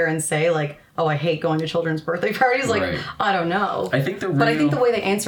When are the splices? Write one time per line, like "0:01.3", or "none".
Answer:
none

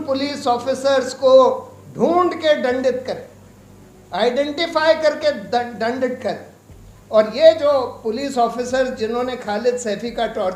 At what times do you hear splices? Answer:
none

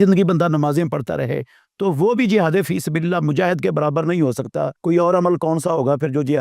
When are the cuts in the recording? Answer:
0:04.7

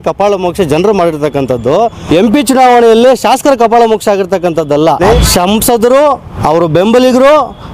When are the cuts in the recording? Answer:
0:02.0
0:05.1
0:06.3

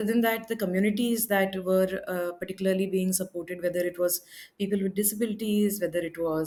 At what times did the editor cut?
none

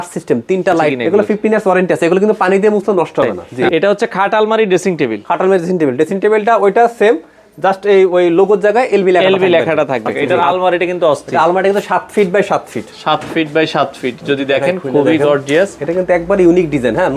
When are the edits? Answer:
0:01.0
0:03.5
0:10.2
0:15.8

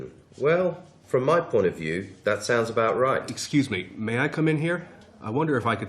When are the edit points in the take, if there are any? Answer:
0:03.3

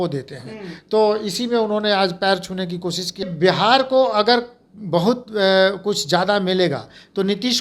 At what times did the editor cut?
0:03.2

